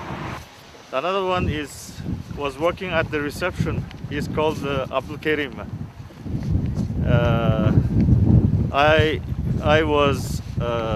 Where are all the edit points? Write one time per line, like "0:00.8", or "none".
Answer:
0:01.3